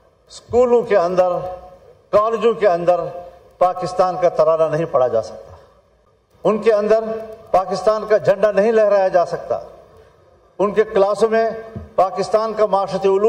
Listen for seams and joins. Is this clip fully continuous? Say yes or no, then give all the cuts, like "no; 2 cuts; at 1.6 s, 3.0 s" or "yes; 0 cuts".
yes; 0 cuts